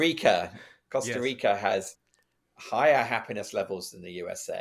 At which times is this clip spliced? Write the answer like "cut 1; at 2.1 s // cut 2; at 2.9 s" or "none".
none